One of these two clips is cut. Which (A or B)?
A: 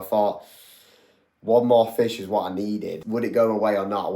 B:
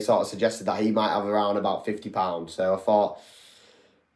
A